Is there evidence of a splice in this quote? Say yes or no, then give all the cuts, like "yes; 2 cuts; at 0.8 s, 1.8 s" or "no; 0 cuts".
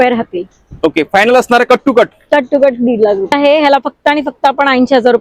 yes; 1 cut; at 3.3 s